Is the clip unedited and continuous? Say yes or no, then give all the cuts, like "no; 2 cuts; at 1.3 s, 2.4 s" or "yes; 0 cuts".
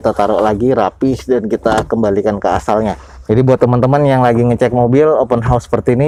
yes; 0 cuts